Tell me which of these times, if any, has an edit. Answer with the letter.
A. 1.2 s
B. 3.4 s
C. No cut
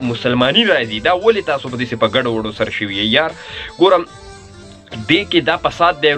C